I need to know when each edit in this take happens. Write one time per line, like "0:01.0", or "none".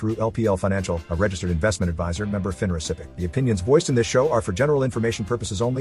0:03.1